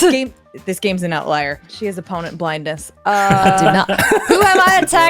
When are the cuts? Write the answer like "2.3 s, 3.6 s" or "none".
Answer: 1.7 s